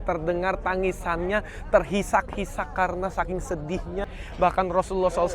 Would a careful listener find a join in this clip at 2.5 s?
no; 1 cut; at 4.2 s

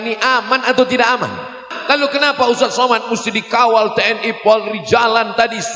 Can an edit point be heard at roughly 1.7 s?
yes; 1 cut; at 1.7 s

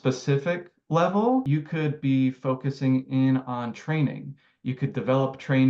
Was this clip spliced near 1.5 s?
yes; 1 cut; at 1.5 s

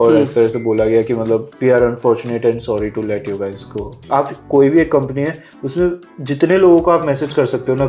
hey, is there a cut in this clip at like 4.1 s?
yes; 2 cuts; at 1.5 s, 4.1 s

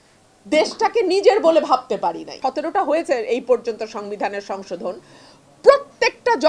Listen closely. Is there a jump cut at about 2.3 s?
yes; 1 cut; at 2.3 s

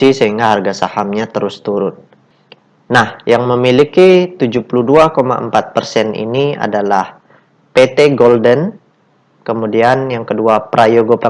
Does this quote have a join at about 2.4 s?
yes; 1 cut; at 2.4 s

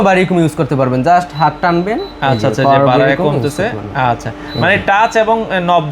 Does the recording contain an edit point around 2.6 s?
no; 0 cuts

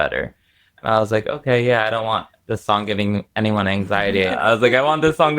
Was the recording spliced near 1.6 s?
no; 1 cut; at 4.3 s

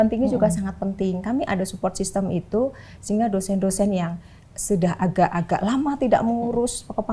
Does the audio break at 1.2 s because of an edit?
no; 0 cuts

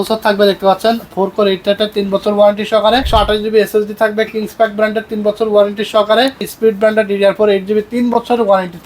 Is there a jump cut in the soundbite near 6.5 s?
yes; 2 cuts; at 3.1 s, 6.5 s

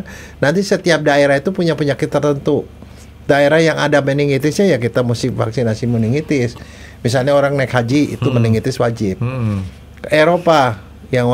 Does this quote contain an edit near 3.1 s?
no; 0 cuts

